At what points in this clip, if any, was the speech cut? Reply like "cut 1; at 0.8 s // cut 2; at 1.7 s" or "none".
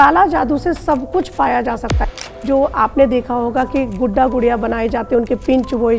cut 1; at 2.1 s